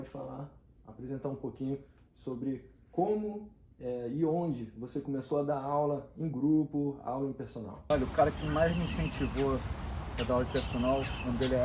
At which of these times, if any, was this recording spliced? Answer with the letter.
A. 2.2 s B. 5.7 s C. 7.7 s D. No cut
C